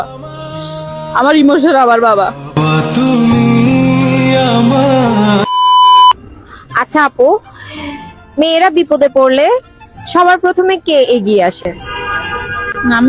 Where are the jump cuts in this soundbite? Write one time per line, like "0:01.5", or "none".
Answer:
0:02.3